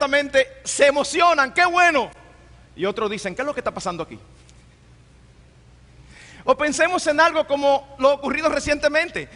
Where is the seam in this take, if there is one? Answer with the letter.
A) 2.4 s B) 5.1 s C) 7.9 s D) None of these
B